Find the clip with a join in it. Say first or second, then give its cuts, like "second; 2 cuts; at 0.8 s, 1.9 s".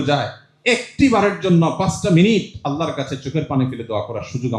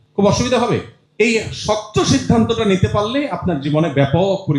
second; 1 cut; at 1.0 s